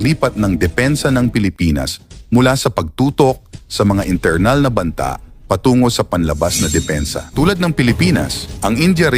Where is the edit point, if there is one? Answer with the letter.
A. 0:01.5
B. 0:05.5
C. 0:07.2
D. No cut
C